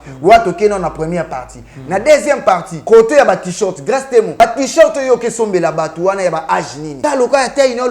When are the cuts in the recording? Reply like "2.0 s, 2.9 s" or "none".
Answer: 2.7 s, 4.4 s, 6.8 s